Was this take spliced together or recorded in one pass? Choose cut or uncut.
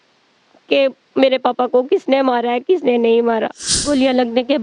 cut